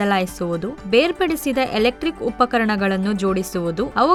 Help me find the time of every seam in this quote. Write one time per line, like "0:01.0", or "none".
none